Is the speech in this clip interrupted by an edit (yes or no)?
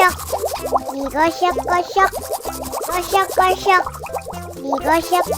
yes